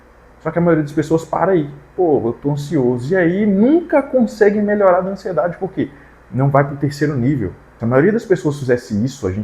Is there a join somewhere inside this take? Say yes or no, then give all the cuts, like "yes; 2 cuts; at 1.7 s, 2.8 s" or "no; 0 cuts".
yes; 1 cut; at 7.6 s